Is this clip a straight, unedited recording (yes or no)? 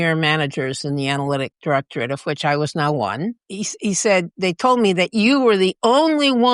no